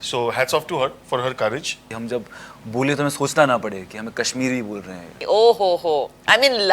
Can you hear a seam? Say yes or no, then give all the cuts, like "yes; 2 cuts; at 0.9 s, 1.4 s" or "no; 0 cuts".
yes; 2 cuts; at 1.9 s, 5.1 s